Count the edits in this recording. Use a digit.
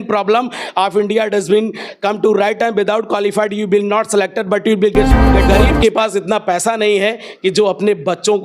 1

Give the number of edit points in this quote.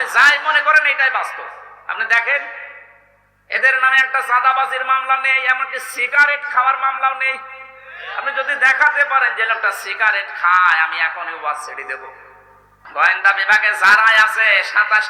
1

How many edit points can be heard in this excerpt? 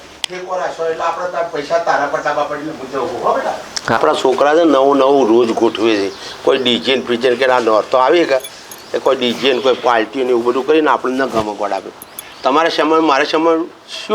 1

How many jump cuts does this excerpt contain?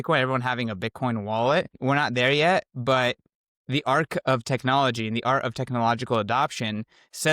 1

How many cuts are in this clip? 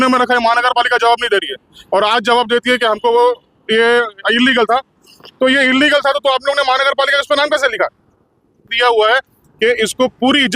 1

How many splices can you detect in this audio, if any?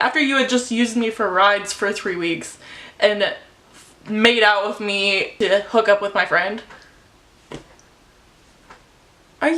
1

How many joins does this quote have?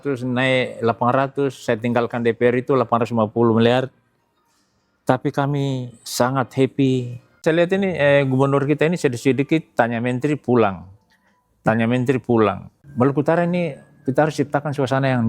2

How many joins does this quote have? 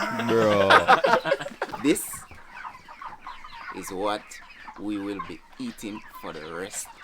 1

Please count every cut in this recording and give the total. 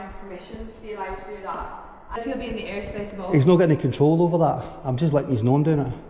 1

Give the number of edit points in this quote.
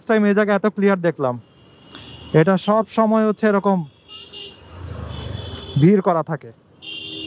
0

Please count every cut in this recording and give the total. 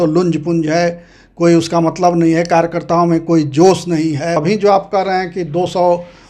1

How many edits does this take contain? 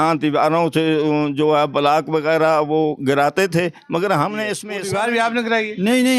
1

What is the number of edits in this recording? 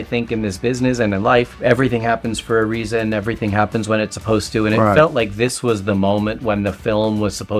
0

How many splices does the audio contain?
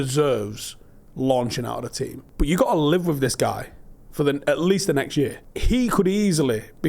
2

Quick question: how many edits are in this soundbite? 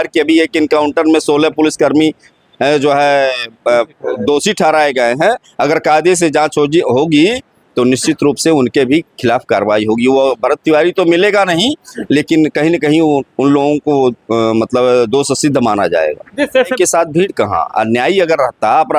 1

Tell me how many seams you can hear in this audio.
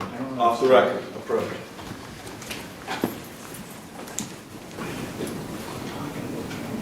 1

